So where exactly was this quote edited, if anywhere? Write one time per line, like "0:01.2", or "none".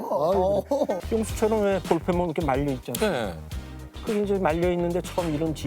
0:01.0